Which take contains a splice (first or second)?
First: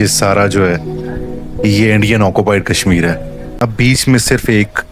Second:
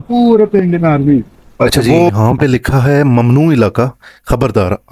first